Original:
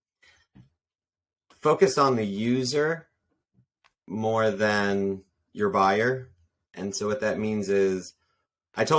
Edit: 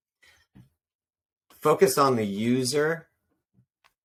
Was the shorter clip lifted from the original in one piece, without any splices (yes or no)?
yes